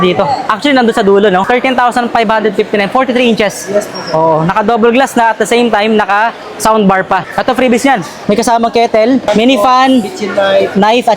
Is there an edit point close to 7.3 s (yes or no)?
yes